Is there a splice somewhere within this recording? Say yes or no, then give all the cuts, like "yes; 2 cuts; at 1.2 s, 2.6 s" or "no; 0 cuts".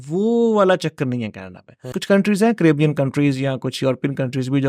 yes; 1 cut; at 2.0 s